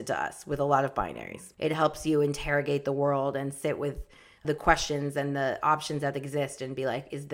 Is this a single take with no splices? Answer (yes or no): no